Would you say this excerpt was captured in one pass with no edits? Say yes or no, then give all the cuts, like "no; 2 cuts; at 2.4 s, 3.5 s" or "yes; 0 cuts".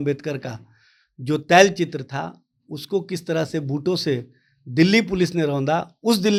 yes; 0 cuts